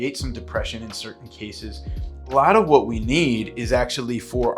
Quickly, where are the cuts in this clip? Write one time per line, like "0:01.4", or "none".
0:02.2